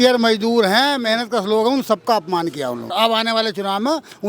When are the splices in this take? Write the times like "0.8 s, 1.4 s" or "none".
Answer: 2.9 s